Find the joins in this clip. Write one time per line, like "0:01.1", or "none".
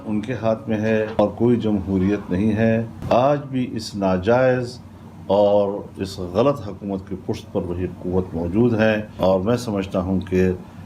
0:01.2
0:02.9
0:09.1